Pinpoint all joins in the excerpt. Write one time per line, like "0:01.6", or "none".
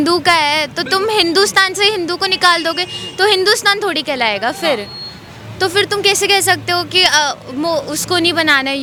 none